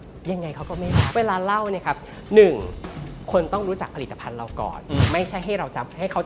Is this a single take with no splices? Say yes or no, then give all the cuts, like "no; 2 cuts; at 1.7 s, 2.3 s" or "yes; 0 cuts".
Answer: no; 1 cut; at 1.1 s